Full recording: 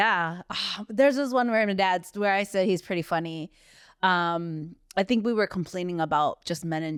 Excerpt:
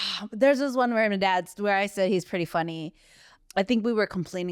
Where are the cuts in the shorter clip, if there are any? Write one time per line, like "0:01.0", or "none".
0:03.2